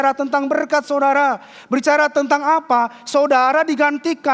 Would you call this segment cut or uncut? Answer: uncut